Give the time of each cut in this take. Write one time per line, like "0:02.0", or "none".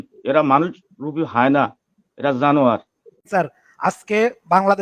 0:03.3